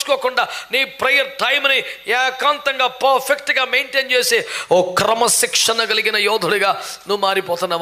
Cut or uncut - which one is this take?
uncut